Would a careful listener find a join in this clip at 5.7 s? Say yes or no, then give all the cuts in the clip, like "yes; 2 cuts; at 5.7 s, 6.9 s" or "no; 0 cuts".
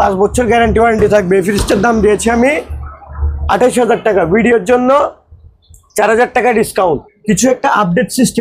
no; 1 cut; at 7.1 s